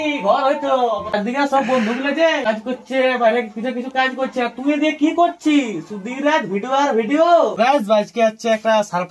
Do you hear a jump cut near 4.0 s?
no; 2 cuts; at 1.1 s, 7.5 s

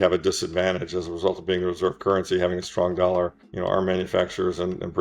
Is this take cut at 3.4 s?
yes; 1 cut; at 3.4 s

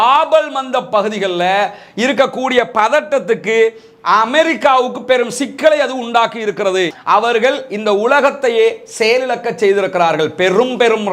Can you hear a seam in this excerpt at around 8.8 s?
no; 1 cut; at 6.9 s

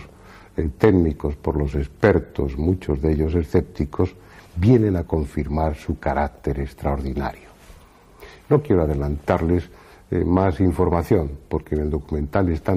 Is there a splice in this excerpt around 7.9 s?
yes; 1 cut; at 7.9 s

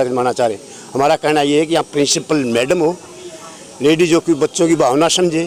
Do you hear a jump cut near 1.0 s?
no; 0 cuts

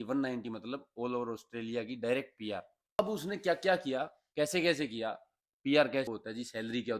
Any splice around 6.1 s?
yes; 1 cut; at 6.1 s

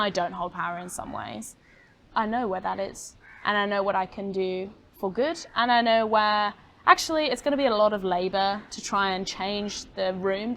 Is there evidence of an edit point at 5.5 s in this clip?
no; 1 cut; at 2.1 s

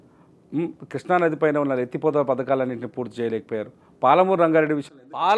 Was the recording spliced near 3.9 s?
no; 0 cuts

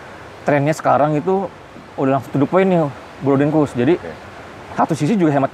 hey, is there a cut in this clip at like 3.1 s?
no; 0 cuts

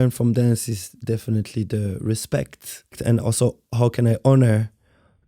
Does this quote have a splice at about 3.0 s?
yes; 1 cut; at 3.0 s

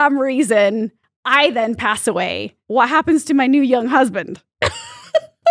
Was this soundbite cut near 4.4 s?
no; 1 cut; at 2.6 s

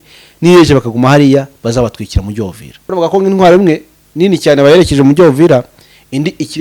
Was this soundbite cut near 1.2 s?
no; 1 cut; at 2.7 s

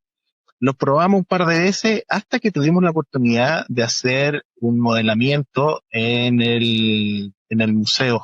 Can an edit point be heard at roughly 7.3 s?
yes; 1 cut; at 7.3 s

